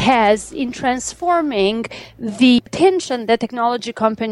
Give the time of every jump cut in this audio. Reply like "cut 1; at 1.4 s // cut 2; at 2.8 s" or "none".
cut 1; at 2.6 s